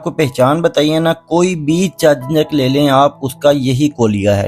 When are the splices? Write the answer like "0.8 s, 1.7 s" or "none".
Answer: none